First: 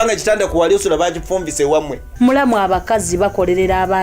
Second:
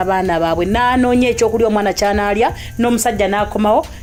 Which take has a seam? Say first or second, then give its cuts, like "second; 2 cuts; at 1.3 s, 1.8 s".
first; 1 cut; at 2.0 s